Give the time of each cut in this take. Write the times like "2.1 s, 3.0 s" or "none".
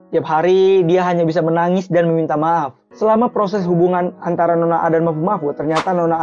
2.8 s